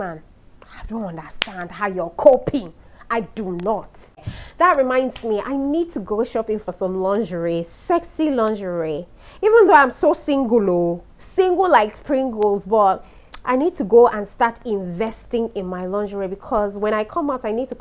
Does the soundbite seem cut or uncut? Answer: cut